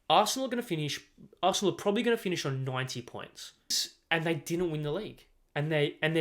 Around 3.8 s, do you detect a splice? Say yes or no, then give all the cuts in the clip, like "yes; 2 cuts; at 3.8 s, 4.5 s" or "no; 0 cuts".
yes; 1 cut; at 3.8 s